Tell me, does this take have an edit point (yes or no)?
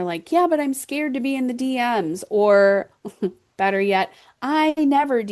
no